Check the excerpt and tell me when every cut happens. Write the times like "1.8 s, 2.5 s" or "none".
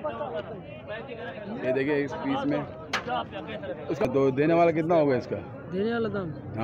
4.1 s